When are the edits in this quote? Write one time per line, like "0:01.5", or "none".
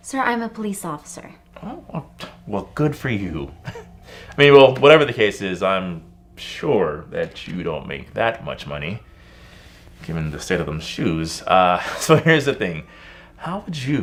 none